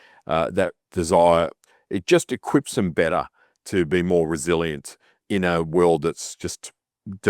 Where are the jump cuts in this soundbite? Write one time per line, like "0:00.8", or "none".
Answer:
0:05.1